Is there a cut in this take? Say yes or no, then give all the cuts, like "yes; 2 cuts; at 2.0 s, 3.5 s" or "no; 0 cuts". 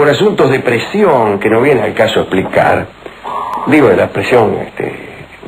yes; 1 cut; at 3.6 s